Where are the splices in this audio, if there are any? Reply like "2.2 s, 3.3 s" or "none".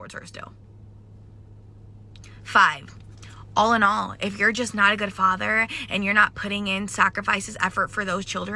4.6 s